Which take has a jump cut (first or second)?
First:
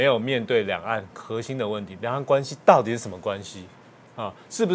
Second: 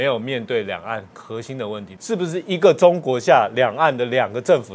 second